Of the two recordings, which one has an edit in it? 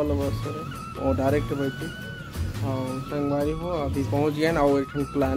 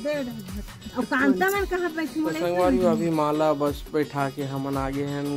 second; 1 cut; at 2.4 s

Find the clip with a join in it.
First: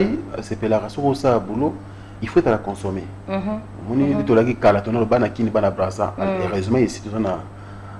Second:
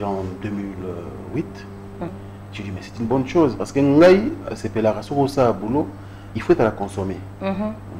second; 1 cut; at 2.1 s

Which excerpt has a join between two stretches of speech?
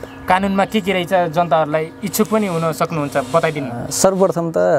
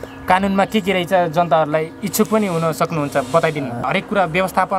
second; 1 cut; at 3.9 s

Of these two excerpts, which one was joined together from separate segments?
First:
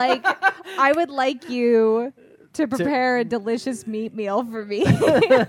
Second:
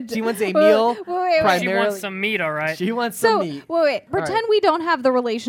second; 1 cut; at 4.1 s

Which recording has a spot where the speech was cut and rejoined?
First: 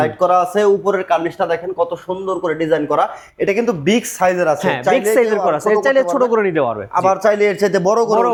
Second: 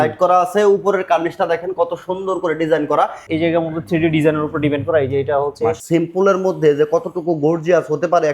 second; 2 cuts; at 3.3 s, 5.8 s

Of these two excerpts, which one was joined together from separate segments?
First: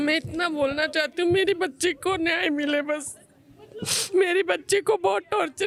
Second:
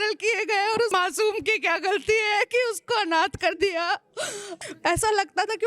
second; 2 cuts; at 0.9 s, 4.5 s

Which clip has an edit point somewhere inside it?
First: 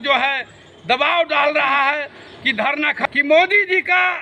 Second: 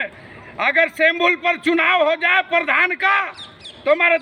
first; 1 cut; at 3.1 s

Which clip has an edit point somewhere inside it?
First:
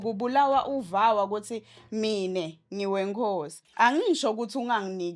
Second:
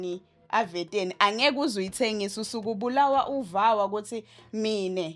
first; 1 cut; at 3.6 s

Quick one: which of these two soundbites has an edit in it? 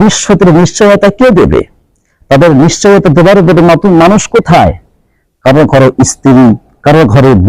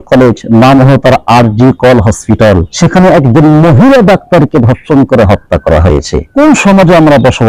second; 2 cuts; at 2.7 s, 6.4 s

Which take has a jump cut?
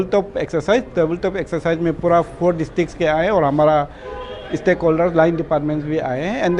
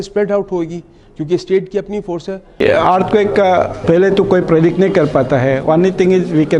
second; 2 cuts; at 2.6 s, 3.8 s

